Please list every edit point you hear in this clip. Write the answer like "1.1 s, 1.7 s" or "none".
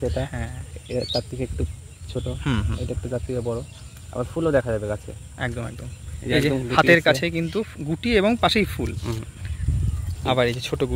none

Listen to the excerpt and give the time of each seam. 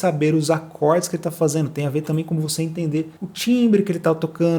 none

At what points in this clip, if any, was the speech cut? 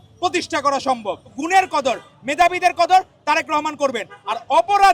1.4 s

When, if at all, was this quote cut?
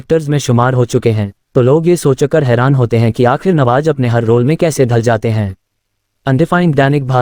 none

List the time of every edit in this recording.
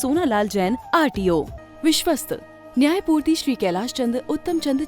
1.6 s

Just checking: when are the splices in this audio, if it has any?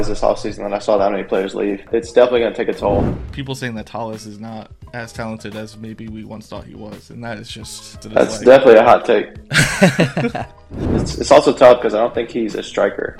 1.9 s, 3.2 s, 8.0 s, 11.0 s

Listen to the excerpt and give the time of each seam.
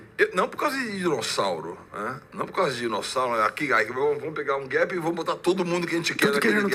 none

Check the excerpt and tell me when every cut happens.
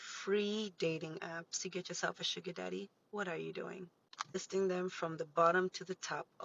none

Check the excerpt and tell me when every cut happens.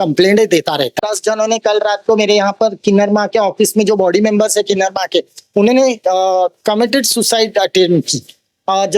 1.1 s

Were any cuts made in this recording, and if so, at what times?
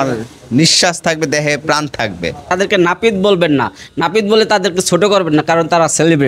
2.6 s

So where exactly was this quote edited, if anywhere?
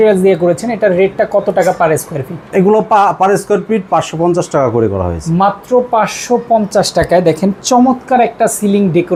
none

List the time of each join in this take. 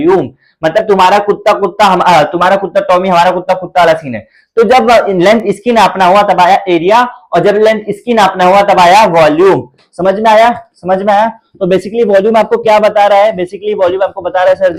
none

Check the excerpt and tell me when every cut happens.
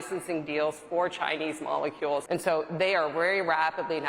2.2 s

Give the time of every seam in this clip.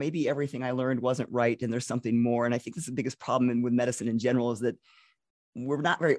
none

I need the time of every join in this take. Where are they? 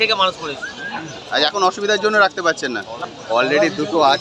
3.0 s

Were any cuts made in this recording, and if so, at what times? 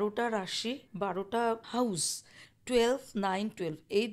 0.9 s, 1.6 s

